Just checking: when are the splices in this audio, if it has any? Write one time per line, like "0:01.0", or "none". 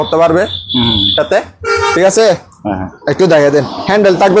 none